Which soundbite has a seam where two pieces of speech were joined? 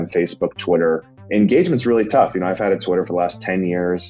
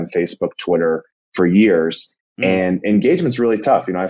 first; 1 cut; at 1.3 s

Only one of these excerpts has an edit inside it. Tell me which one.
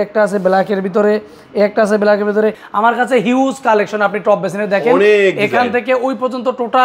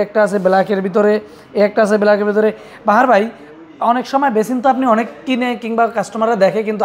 first; 1 cut; at 2.7 s

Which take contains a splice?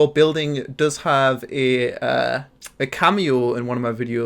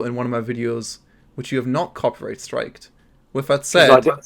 first; 1 cut; at 2.6 s

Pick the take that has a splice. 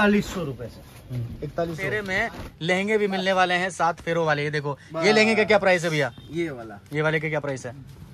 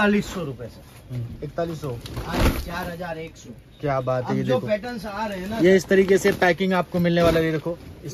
first; 1 cut; at 2.1 s

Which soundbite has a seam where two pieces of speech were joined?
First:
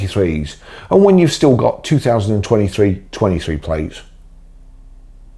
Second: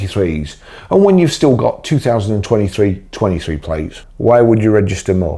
second; 1 cut; at 4.0 s

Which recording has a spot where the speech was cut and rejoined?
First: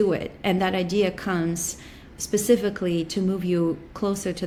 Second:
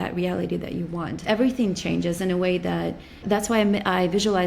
second; 2 cuts; at 1.2 s, 3.2 s

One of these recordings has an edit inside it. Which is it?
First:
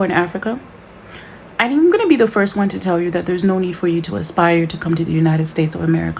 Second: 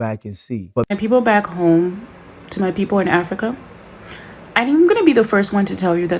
second; 1 cut; at 0.9 s

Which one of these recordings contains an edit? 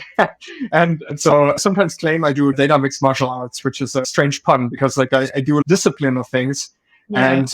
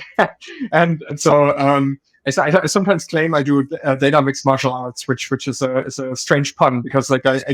first; 3 cuts; at 1.6 s, 2.5 s, 4.0 s

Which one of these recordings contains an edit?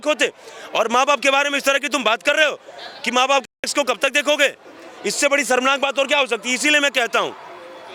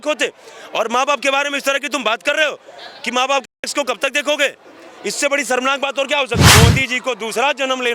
second; 1 cut; at 6.4 s

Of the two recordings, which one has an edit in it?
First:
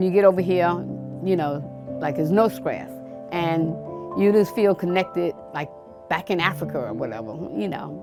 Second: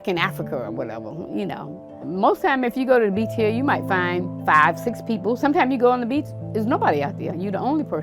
second; 1 cut; at 4.3 s

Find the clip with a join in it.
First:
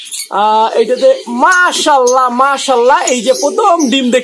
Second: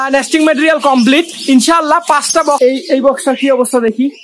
second; 1 cut; at 2.6 s

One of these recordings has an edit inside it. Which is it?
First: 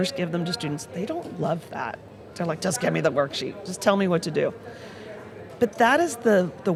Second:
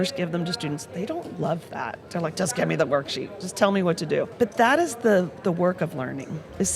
second; 2 cuts; at 2.0 s, 4.3 s

